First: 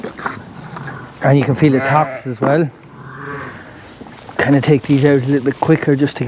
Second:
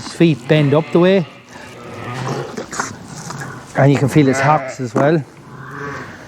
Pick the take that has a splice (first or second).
second